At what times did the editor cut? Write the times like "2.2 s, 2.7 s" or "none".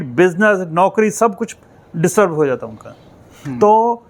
none